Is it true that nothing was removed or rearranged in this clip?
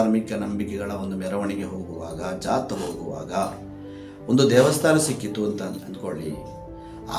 yes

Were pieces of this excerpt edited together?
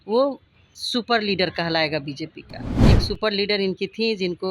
yes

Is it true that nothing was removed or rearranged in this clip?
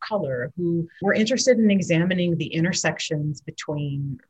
no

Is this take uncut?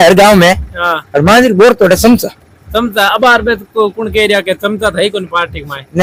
yes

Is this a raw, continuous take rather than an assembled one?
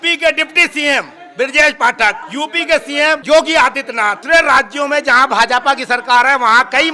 no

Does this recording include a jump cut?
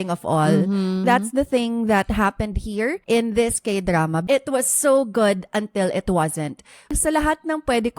yes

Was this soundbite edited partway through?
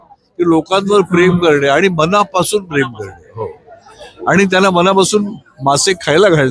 no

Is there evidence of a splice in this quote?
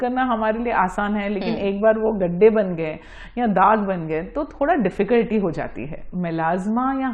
yes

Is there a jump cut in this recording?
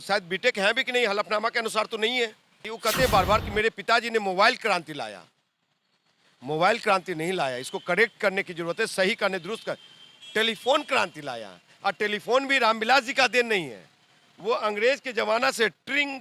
yes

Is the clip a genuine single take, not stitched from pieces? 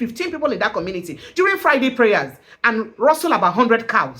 yes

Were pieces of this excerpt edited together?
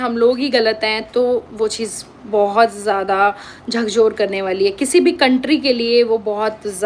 no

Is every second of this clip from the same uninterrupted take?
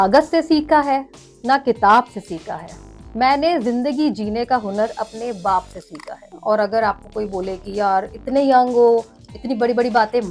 no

